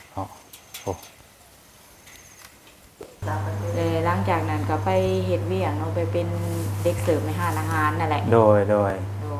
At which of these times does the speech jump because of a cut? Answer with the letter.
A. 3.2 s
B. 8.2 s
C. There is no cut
A